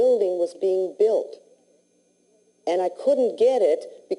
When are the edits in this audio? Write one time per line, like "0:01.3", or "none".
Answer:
0:00.9